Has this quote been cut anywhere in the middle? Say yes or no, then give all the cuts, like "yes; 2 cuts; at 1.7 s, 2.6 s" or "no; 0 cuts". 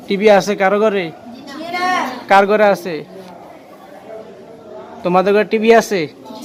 no; 0 cuts